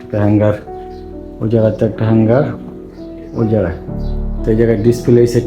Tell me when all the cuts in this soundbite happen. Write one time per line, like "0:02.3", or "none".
none

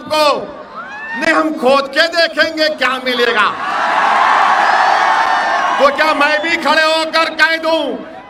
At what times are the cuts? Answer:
none

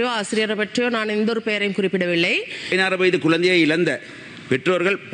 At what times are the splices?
0:02.7

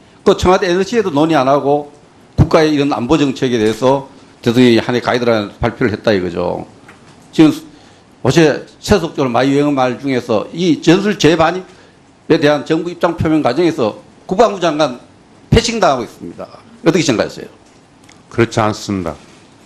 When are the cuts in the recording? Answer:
0:05.9

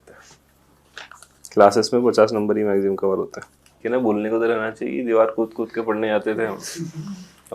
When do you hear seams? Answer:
0:03.7

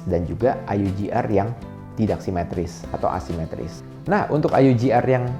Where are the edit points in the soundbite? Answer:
0:03.7

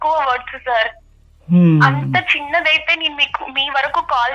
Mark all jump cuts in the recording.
none

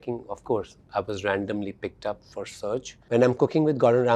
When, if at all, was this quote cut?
0:03.0

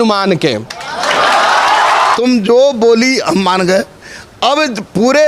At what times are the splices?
0:02.1

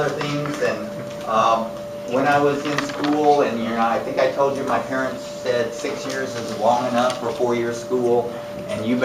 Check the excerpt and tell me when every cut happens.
0:05.3

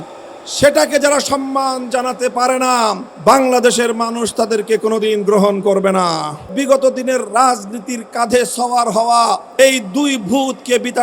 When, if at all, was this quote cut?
0:03.1
0:06.5
0:09.5

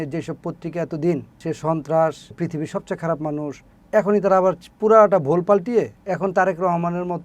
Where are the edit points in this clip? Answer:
0:01.4
0:02.3
0:03.7
0:06.0

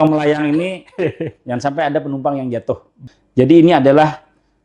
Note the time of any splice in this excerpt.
0:03.0

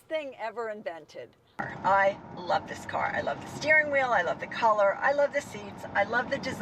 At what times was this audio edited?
0:01.6

